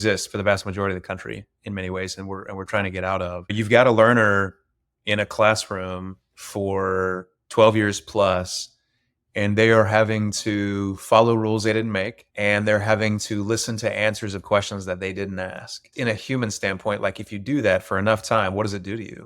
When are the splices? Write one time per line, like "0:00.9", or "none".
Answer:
0:03.5
0:12.2
0:15.9